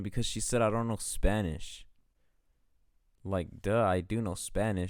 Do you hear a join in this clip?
no; 0 cuts

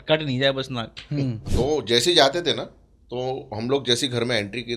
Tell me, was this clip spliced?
yes; 1 cut; at 1.4 s

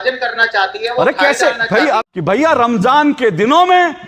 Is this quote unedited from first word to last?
no; 1 cut; at 2.0 s

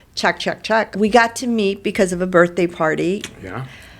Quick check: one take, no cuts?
no; 1 cut; at 0.9 s

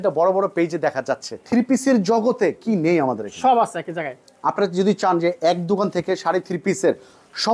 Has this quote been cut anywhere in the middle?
yes; 1 cut; at 1.3 s

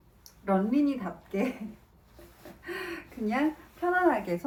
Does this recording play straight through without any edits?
yes; 0 cuts

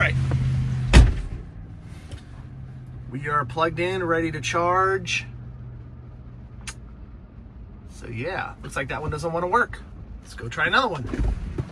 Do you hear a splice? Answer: no; 0 cuts

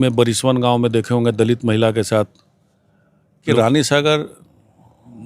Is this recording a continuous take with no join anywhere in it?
no; 1 cut; at 3.5 s

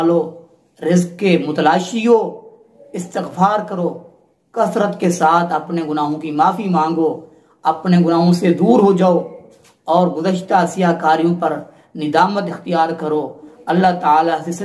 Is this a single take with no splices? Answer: no; 1 cut; at 13.5 s

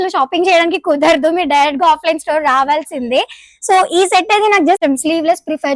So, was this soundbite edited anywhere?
yes; 1 cut; at 4.8 s

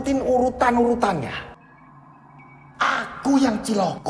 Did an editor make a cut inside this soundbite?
no; 0 cuts

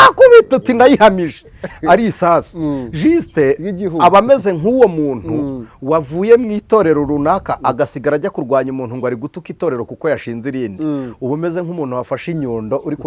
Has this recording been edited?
no; 0 cuts

